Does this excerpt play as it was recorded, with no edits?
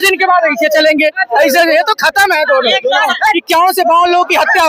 no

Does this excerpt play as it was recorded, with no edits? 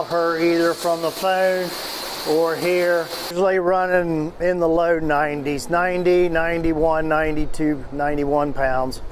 no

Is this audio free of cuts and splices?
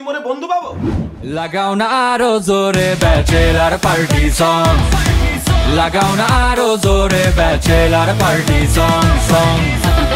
no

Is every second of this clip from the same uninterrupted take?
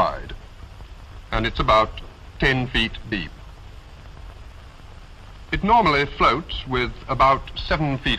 yes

